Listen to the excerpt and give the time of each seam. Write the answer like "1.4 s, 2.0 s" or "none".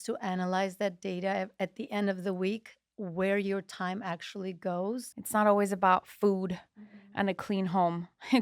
5.1 s